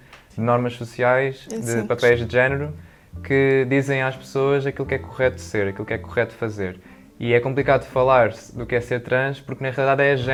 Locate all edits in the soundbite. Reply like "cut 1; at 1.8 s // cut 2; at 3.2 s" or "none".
none